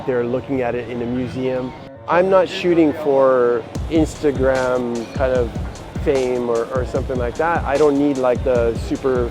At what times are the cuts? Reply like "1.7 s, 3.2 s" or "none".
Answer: 2.0 s, 3.8 s